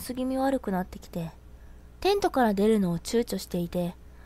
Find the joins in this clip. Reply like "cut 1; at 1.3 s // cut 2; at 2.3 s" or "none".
none